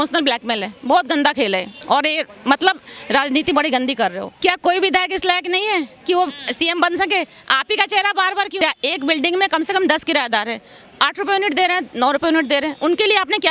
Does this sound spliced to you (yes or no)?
yes